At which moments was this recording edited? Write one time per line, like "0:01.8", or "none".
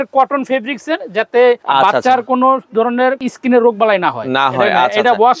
0:01.6
0:03.2